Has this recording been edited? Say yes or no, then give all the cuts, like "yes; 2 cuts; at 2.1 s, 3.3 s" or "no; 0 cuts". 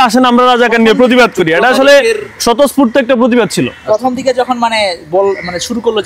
no; 0 cuts